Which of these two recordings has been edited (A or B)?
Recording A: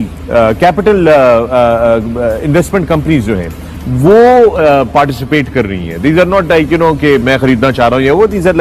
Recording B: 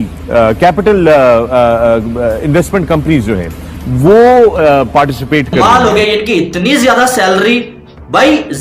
B